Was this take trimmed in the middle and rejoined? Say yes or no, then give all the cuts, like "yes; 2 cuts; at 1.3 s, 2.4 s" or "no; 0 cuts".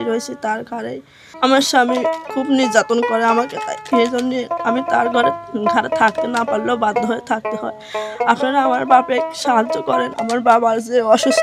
yes; 3 cuts; at 1.3 s, 2.2 s, 10.2 s